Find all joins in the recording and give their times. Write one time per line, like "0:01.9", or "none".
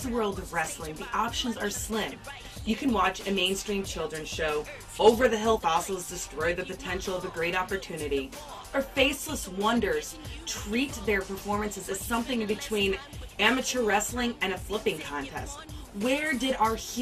0:07.2